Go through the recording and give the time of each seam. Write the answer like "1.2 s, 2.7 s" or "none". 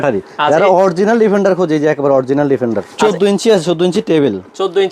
2.9 s